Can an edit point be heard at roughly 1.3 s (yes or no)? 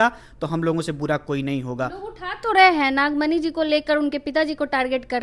no